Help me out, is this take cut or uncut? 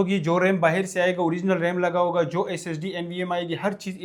uncut